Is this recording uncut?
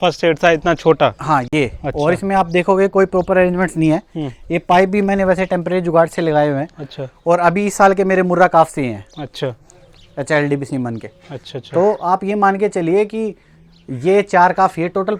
yes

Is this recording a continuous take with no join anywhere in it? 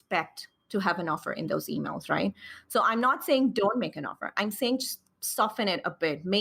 yes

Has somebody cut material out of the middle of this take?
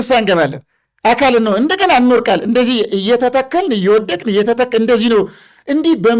no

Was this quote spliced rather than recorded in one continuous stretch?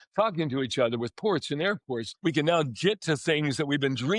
yes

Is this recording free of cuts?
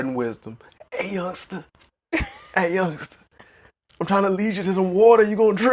yes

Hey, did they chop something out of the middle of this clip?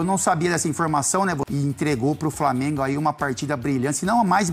yes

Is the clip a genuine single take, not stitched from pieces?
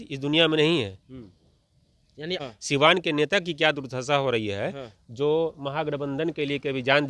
no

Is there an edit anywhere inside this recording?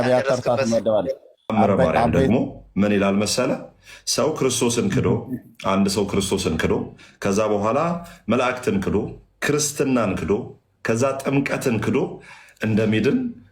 yes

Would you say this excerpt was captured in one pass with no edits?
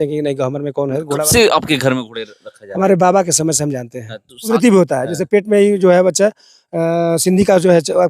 no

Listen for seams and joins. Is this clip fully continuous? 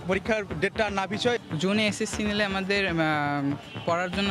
no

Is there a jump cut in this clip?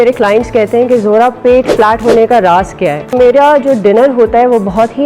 yes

